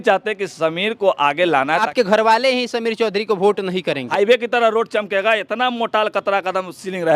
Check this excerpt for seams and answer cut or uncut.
cut